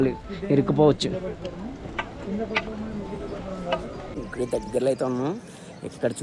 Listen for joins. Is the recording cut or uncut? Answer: cut